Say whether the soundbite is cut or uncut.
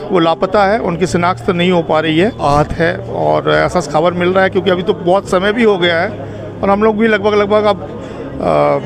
cut